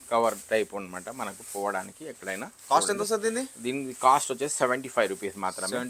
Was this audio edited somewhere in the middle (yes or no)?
no